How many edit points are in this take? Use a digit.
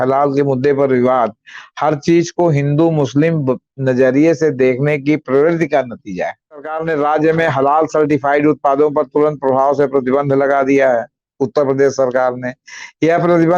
1